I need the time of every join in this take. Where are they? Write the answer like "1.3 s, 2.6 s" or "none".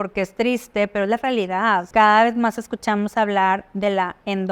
1.9 s